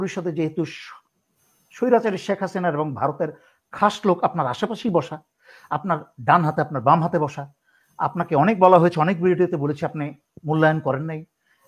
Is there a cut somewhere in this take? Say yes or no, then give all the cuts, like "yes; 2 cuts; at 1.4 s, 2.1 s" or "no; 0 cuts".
no; 0 cuts